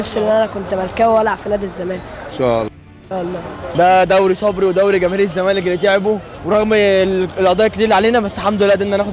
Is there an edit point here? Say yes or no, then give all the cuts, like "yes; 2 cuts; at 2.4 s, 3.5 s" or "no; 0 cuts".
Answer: no; 0 cuts